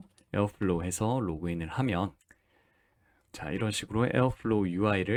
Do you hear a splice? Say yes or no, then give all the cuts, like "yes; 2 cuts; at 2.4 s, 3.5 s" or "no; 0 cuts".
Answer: no; 0 cuts